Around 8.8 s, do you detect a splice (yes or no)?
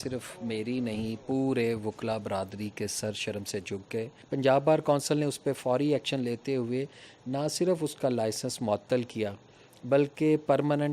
no